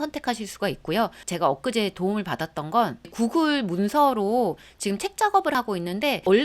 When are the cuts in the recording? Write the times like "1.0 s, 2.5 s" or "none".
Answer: 1.2 s, 5.5 s